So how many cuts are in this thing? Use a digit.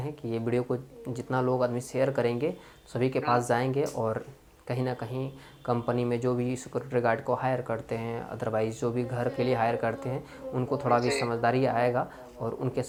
0